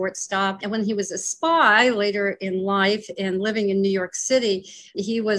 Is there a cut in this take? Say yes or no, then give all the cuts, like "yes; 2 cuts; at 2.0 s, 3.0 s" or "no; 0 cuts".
no; 0 cuts